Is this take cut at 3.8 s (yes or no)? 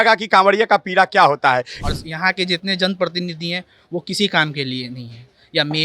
no